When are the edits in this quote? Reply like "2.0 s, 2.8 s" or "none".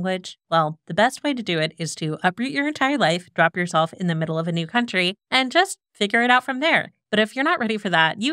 7.0 s